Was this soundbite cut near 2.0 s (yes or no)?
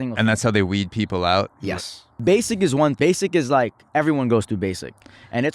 yes